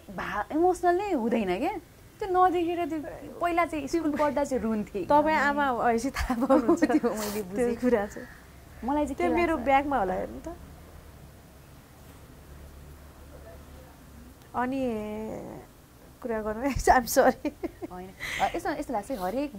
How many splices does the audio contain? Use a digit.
0